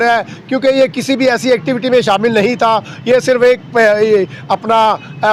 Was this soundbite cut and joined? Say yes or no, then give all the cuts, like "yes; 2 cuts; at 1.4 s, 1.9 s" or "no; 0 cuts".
no; 0 cuts